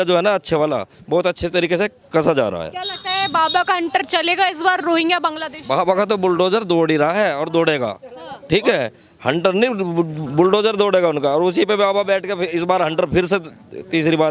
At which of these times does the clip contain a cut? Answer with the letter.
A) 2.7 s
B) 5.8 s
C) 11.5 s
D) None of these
D